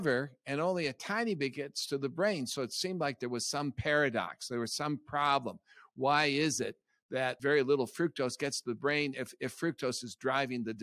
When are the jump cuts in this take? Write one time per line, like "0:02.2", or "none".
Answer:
0:07.4